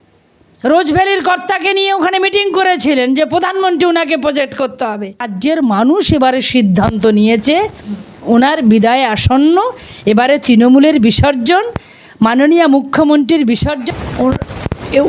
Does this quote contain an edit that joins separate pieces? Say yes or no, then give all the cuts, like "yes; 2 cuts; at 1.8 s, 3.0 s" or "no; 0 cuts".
yes; 2 cuts; at 5.3 s, 13.8 s